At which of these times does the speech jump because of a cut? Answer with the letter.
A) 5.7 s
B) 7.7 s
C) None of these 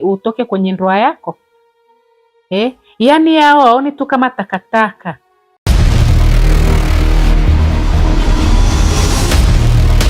A